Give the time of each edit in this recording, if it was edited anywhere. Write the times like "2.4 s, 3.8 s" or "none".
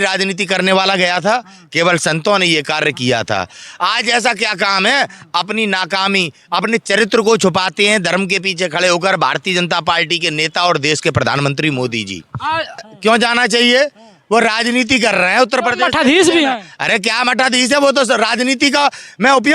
12.9 s